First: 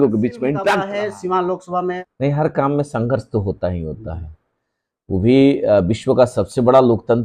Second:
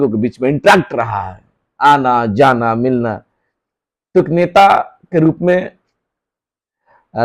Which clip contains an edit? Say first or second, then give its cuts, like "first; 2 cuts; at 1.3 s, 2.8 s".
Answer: first; 2 cuts; at 0.8 s, 2.1 s